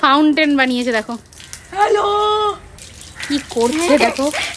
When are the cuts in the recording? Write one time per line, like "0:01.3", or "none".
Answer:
none